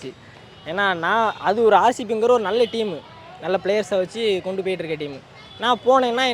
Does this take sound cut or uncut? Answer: uncut